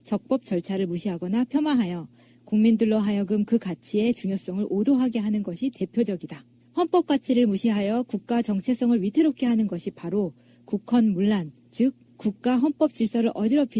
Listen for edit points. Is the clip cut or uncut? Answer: uncut